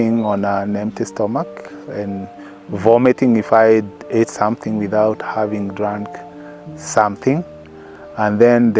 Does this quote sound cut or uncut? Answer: uncut